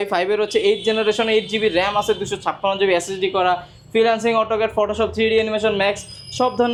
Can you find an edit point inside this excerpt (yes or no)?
no